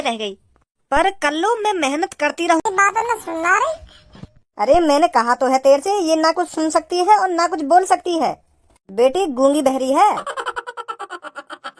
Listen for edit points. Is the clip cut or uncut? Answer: cut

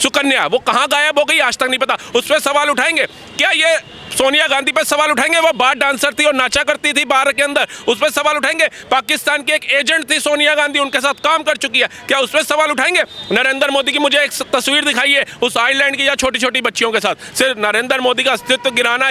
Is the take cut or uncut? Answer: uncut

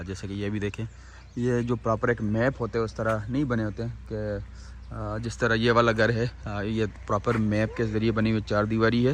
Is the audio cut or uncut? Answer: uncut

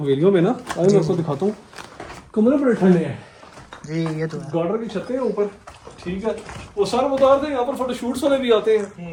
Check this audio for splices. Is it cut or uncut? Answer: uncut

